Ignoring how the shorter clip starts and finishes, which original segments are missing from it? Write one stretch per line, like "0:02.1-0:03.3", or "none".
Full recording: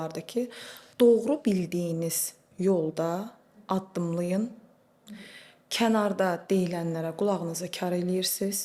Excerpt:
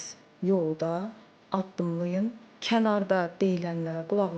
0:04.7-0:05.6